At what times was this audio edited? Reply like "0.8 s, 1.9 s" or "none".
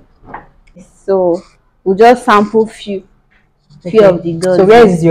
0.9 s